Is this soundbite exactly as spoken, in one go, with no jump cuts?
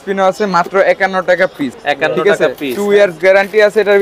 no; 1 cut; at 1.7 s

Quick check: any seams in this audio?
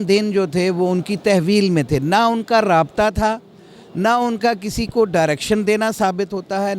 no; 0 cuts

